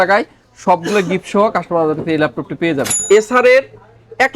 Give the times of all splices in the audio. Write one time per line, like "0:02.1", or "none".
0:02.9

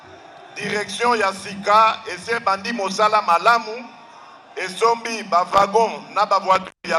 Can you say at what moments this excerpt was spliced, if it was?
none

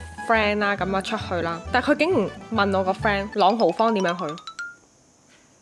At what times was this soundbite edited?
0:01.6

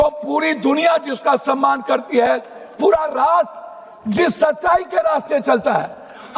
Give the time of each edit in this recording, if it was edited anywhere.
none

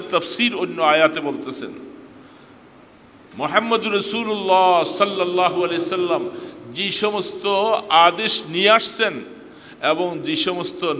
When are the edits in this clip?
none

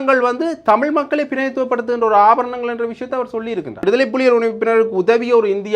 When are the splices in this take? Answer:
0:03.8

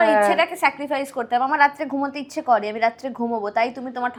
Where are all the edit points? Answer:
none

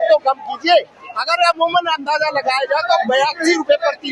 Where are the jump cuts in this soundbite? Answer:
none

